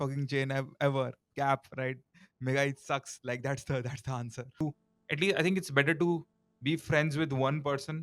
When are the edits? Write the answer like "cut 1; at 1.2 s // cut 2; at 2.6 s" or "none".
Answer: cut 1; at 4.6 s